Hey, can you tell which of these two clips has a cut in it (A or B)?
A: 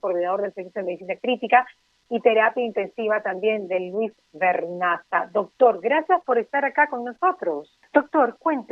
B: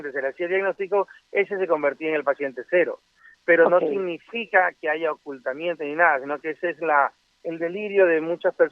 A